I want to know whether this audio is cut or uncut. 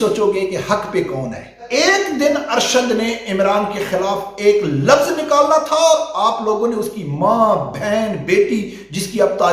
cut